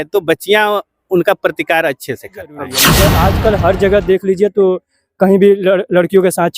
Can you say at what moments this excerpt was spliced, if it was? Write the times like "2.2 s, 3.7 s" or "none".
2.8 s